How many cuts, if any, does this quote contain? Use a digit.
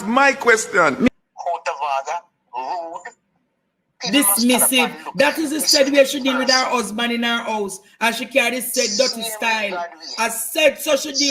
1